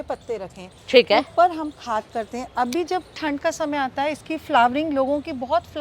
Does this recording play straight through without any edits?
yes; 0 cuts

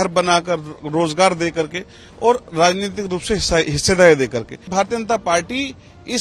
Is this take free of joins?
no; 1 cut; at 4.6 s

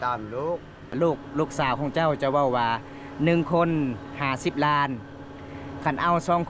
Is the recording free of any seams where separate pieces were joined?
no; 1 cut; at 0.9 s

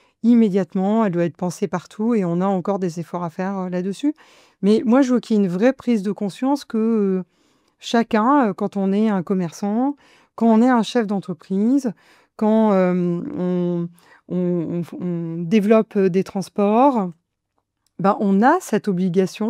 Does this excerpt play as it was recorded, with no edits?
yes; 0 cuts

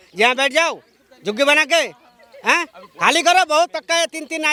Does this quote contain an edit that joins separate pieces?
no; 0 cuts

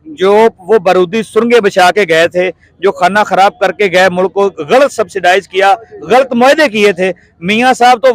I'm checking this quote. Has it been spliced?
no; 0 cuts

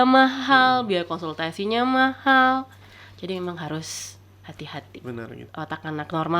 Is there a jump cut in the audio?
yes; 1 cut; at 5.4 s

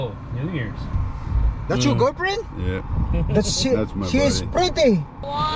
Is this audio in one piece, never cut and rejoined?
no; 1 cut; at 1.0 s

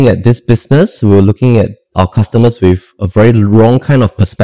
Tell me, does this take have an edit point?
yes; 1 cut; at 1.9 s

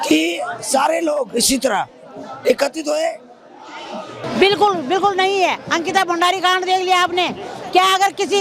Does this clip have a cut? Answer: yes; 1 cut; at 4.2 s

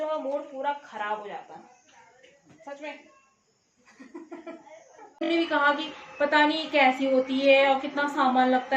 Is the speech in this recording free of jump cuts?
no; 1 cut; at 5.3 s

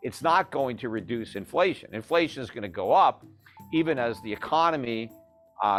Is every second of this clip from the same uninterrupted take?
yes; 0 cuts

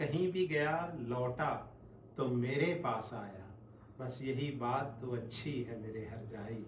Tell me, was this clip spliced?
no; 0 cuts

